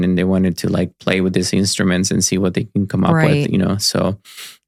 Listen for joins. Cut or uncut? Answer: uncut